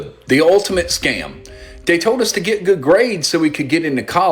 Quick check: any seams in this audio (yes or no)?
no